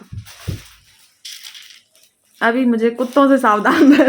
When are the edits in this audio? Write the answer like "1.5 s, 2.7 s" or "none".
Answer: none